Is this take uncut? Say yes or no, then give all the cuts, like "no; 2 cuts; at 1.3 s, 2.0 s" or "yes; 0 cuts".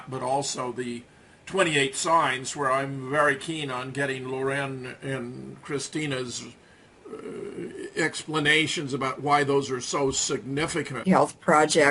yes; 0 cuts